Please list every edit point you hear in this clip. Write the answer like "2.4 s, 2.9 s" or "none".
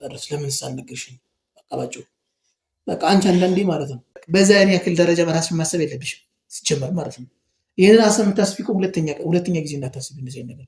4.1 s